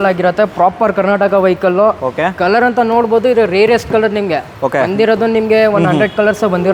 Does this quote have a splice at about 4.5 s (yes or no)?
no